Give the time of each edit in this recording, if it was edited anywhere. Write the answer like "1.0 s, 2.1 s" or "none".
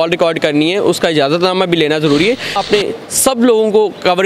2.6 s

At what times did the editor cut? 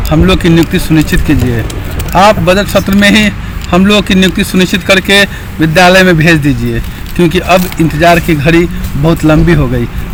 none

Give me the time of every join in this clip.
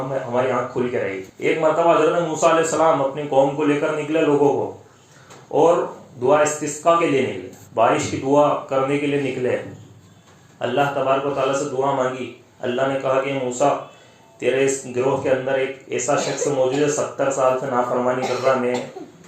1.3 s

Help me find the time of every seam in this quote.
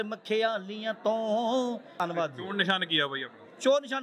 2.0 s

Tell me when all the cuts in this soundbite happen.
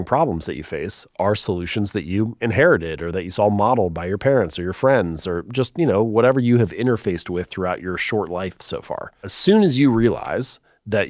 9.3 s

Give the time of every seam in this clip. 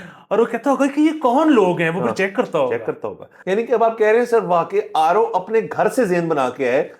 3.3 s

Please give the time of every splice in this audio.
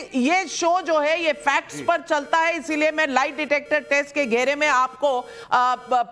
none

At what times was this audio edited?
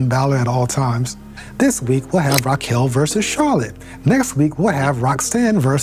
1.4 s

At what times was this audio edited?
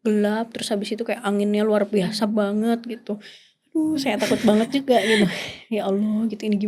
none

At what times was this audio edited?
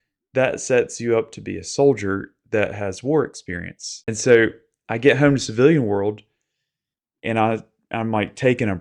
4.1 s

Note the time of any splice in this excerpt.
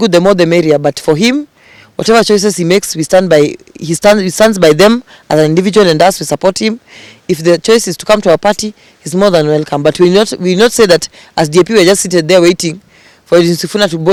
none

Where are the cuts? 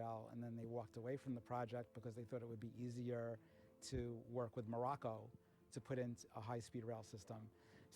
none

